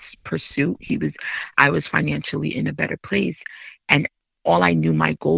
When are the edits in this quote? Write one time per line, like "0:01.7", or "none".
none